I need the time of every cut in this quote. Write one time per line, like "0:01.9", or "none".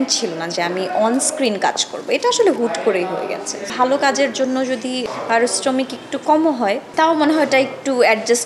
0:03.7
0:05.0
0:06.8